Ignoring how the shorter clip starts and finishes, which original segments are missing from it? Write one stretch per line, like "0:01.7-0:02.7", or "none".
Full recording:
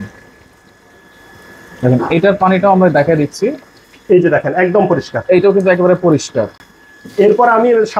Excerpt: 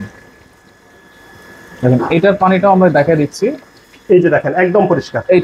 none